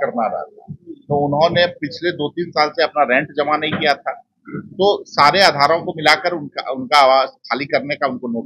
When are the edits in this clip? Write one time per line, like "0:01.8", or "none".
none